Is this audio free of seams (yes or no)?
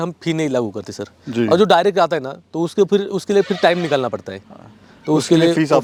yes